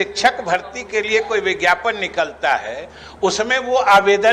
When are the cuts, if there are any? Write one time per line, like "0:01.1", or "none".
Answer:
none

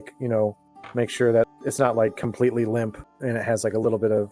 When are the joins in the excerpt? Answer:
0:01.6
0:03.1

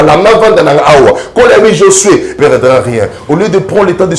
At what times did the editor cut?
0:02.3

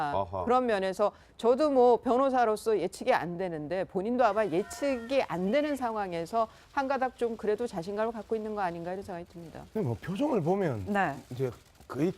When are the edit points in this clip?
0:08.2

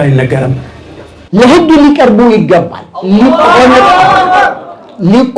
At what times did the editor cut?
0:01.3

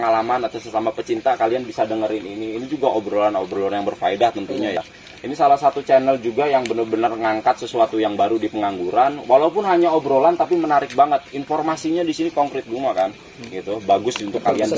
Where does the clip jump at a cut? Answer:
none

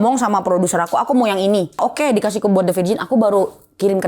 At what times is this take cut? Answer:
0:01.8

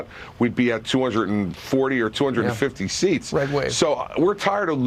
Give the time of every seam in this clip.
0:03.7

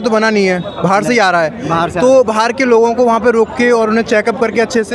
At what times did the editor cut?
none

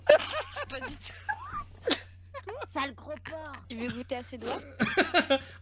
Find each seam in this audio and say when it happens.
0:03.6

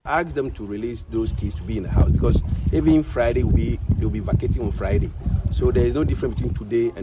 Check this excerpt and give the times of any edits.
none

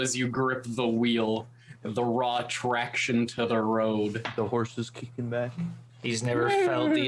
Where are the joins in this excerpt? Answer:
0:05.9

